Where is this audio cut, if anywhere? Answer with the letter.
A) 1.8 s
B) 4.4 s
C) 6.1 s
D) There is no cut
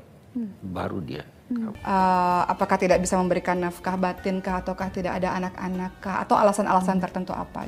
A